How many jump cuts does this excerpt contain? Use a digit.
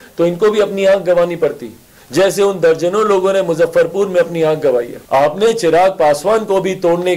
1